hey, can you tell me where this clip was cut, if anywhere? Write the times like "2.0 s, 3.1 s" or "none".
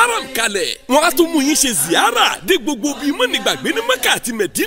none